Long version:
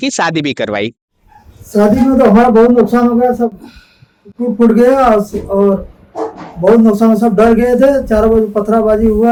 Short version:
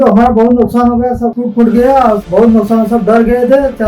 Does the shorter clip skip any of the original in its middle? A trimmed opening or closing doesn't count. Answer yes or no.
yes